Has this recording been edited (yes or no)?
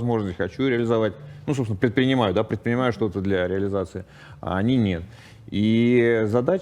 no